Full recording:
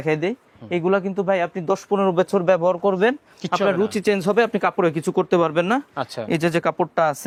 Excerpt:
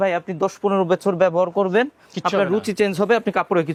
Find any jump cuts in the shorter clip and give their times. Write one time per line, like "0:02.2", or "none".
none